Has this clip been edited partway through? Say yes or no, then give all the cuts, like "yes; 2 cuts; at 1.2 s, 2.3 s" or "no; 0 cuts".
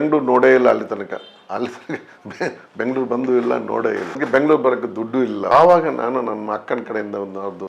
no; 0 cuts